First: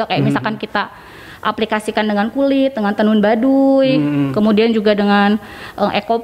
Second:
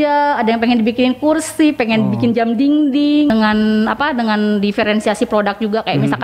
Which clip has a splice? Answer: second; 1 cut; at 3.3 s

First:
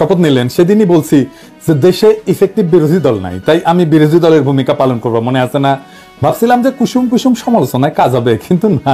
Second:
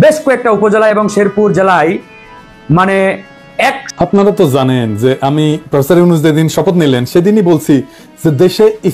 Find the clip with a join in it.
second; 1 cut; at 3.9 s

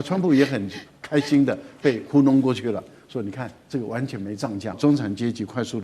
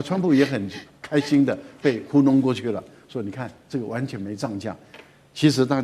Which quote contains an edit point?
first; 1 cut; at 4.8 s

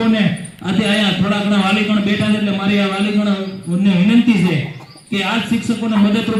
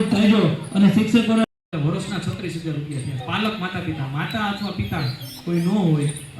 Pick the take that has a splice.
second; 1 cut; at 1.4 s

